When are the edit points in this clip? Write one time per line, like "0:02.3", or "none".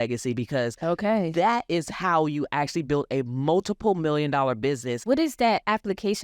0:05.0